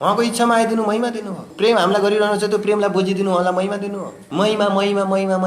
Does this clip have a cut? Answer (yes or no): yes